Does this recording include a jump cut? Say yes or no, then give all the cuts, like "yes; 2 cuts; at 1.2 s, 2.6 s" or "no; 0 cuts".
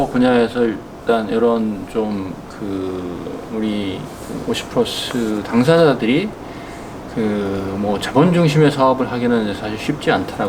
no; 0 cuts